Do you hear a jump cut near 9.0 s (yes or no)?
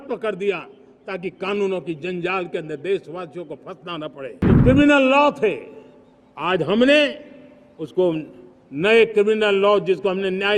no